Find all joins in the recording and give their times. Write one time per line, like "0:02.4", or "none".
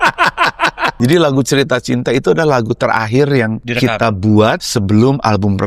0:00.9
0:03.6
0:04.6